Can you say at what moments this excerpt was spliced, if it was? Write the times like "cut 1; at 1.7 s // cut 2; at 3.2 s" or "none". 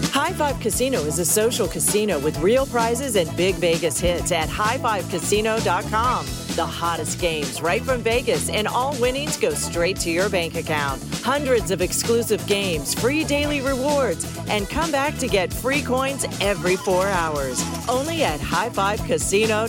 none